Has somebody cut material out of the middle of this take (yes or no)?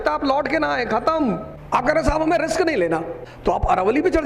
yes